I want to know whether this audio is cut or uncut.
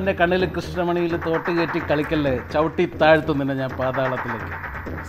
uncut